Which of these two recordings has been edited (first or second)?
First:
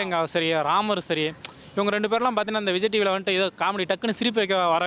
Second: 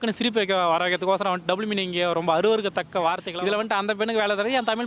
second